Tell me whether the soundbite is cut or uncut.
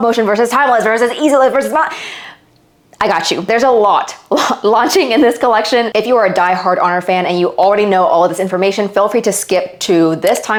uncut